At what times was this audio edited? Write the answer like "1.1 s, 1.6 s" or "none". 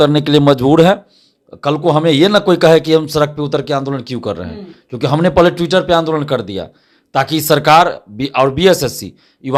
none

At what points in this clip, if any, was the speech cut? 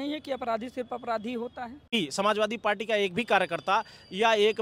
1.9 s

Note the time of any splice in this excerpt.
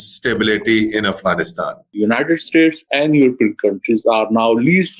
1.8 s

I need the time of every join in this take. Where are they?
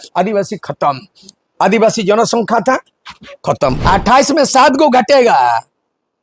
3.8 s

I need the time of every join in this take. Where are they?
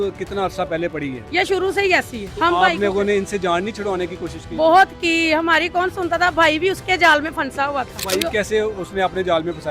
1.2 s

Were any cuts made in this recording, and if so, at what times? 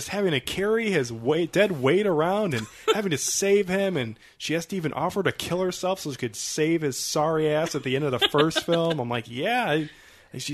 none

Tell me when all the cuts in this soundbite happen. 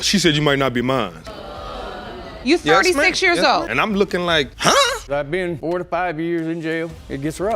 5.1 s

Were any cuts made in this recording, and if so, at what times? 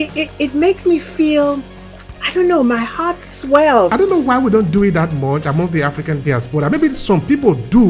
3.9 s

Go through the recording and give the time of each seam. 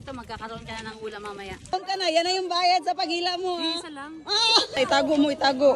1.7 s, 4.8 s

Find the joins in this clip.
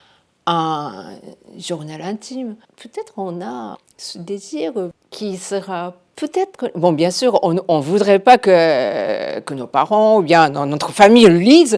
2.7 s, 3.8 s, 5.0 s

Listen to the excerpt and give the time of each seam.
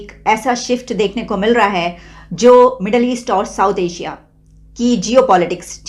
none

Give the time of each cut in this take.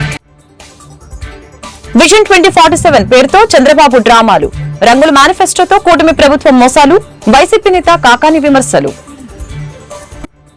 1.6 s

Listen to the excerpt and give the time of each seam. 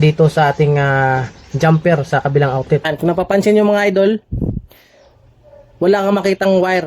2.9 s

